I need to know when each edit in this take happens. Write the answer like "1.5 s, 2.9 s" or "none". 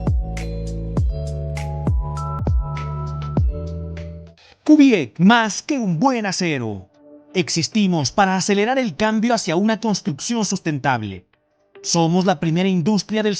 4.2 s